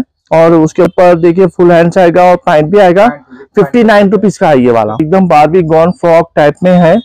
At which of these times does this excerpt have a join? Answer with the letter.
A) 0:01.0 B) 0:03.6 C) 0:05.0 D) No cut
C